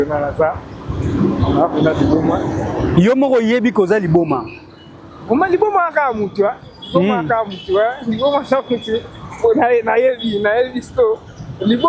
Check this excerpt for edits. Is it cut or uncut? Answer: uncut